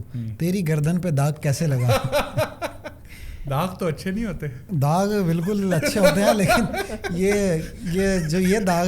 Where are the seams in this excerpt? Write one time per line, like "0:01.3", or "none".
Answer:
none